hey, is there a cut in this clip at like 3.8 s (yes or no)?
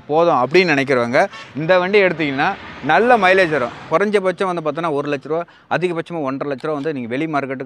yes